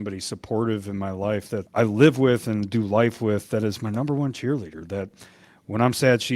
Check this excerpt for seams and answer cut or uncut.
cut